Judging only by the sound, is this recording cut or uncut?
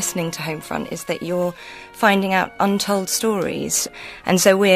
cut